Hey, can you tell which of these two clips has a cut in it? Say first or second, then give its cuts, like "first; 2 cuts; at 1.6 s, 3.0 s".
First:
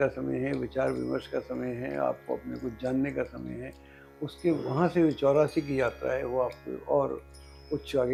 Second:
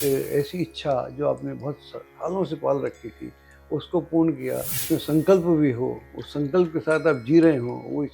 second; 1 cut; at 4.8 s